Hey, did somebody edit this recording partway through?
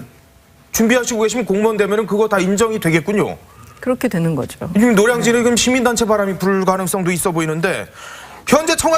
no; 0 cuts

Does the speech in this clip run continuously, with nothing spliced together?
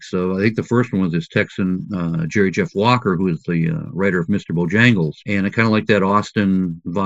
yes; 0 cuts

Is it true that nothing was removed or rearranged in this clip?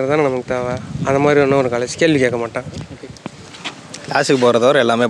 yes; 0 cuts

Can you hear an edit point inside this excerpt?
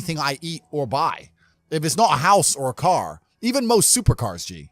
no; 0 cuts

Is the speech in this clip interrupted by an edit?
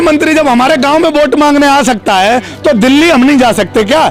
no; 0 cuts

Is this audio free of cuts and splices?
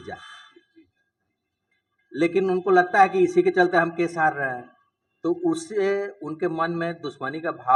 yes; 0 cuts

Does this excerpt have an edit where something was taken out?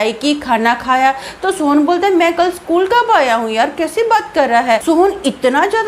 yes; 1 cut; at 4.8 s

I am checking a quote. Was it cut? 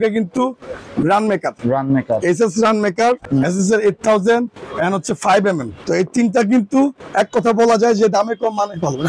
yes; 3 cuts; at 3.2 s, 5.8 s, 7.0 s

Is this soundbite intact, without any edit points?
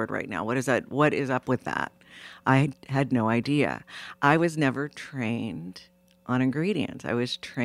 yes; 0 cuts

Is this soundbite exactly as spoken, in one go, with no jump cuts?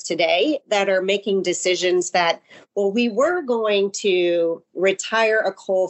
yes; 0 cuts

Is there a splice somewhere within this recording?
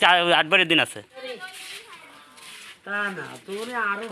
yes; 1 cut; at 1.2 s

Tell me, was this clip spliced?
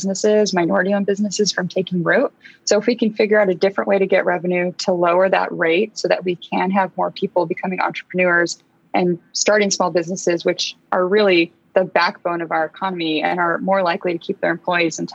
no; 0 cuts

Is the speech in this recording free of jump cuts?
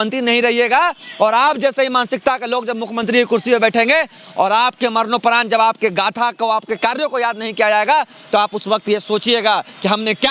yes; 0 cuts

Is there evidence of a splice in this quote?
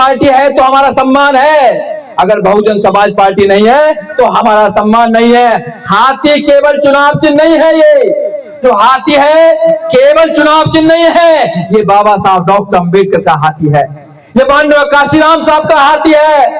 no; 0 cuts

